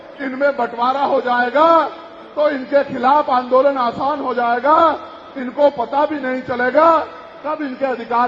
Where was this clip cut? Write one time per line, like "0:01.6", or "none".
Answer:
none